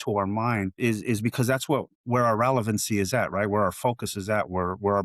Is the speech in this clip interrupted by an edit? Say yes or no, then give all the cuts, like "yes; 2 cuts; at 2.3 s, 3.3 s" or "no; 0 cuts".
yes; 2 cuts; at 0.8 s, 1.9 s